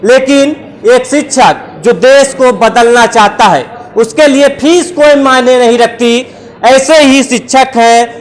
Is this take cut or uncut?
uncut